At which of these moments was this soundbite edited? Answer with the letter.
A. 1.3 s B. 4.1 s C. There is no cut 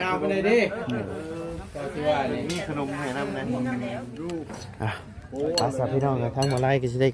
B